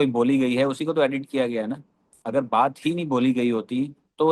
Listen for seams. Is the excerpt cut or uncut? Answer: uncut